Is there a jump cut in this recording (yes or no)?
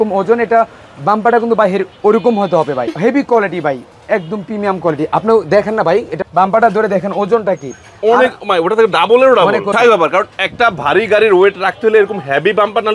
yes